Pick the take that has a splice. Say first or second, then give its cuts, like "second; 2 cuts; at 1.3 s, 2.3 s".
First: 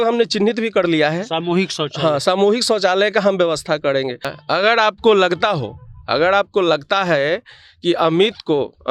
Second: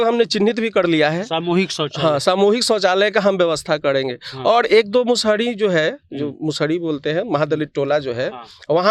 first; 1 cut; at 4.3 s